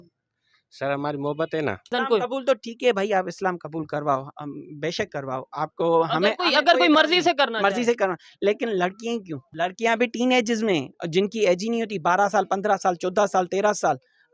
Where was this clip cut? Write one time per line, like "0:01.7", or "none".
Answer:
0:01.9
0:09.5